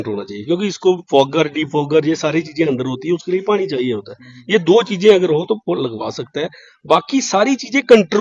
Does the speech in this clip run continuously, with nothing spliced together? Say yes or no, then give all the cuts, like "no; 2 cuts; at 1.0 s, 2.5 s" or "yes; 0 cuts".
yes; 0 cuts